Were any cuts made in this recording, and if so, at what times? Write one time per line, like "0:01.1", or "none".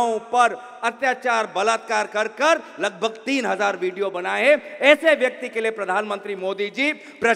none